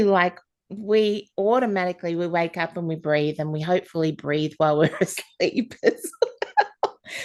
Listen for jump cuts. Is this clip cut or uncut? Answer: uncut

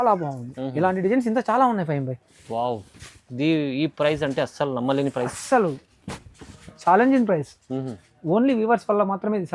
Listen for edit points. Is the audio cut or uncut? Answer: uncut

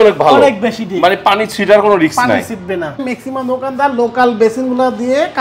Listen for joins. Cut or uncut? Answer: cut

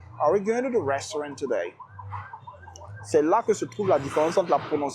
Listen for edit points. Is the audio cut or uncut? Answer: uncut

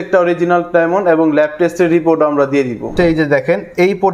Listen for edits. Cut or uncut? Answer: cut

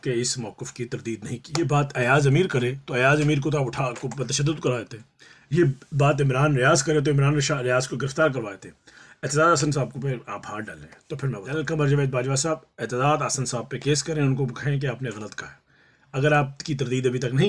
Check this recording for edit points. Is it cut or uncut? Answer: cut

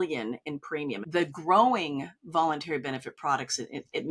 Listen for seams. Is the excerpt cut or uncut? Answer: cut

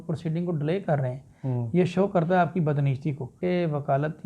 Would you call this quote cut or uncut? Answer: cut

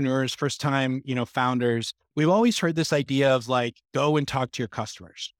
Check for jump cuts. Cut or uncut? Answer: uncut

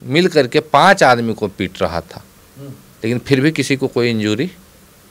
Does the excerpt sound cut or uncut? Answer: uncut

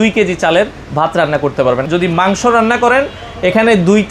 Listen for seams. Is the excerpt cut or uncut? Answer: cut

